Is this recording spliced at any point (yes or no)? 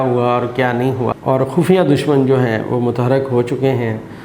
yes